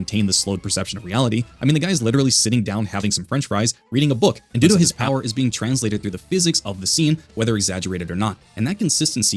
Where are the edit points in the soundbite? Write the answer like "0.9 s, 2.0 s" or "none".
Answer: 5.0 s